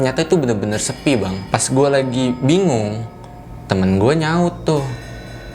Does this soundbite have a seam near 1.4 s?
yes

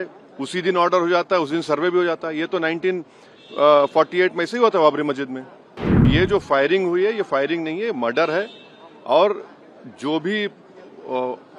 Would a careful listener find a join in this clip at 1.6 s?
no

